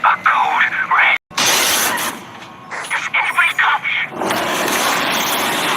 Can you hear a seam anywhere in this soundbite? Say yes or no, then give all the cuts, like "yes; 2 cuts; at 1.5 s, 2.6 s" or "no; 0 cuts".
yes; 1 cut; at 1.3 s